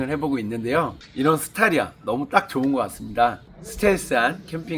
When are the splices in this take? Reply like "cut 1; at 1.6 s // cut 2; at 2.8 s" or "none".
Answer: cut 1; at 1.0 s // cut 2; at 3.5 s